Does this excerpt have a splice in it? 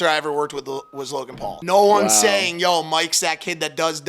yes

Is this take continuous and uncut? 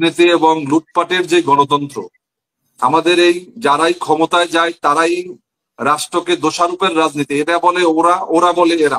yes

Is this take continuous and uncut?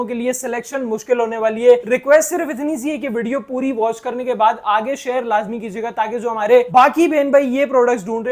yes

